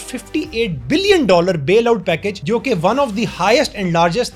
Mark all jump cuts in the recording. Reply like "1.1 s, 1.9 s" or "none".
none